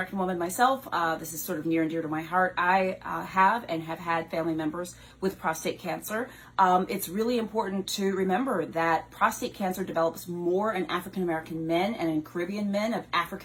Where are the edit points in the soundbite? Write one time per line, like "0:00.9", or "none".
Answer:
none